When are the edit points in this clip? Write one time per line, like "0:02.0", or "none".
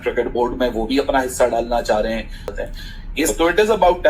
0:02.6